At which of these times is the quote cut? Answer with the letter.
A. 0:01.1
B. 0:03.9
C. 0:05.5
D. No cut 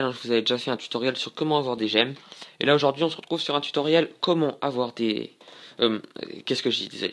D